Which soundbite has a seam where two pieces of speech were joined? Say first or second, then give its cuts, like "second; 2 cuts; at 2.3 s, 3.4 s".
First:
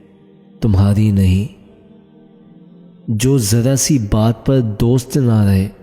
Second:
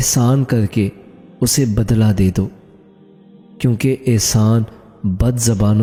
first; 2 cuts; at 1.7 s, 3.0 s